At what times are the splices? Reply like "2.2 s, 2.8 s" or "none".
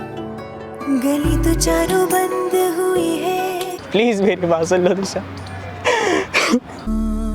3.8 s